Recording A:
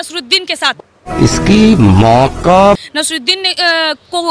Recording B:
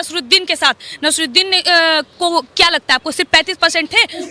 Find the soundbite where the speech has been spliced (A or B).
B